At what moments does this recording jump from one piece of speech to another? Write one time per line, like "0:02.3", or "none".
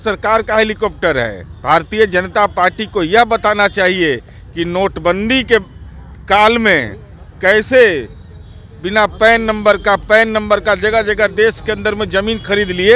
0:01.5